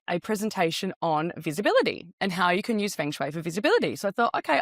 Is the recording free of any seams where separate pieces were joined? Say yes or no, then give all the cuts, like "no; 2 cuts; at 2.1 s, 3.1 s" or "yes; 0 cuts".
yes; 0 cuts